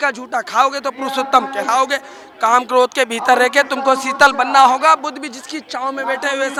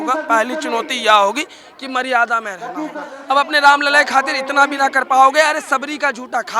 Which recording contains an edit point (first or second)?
second